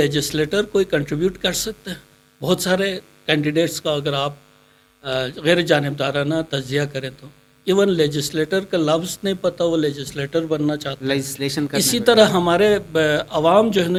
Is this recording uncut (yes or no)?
yes